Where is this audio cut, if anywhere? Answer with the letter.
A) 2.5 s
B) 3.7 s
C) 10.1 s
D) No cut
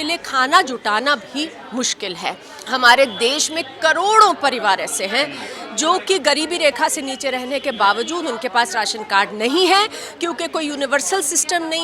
A